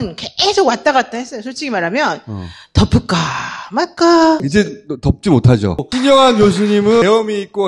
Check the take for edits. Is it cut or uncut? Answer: cut